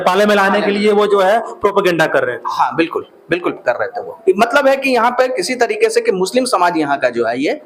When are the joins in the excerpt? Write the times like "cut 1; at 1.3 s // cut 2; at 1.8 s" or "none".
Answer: none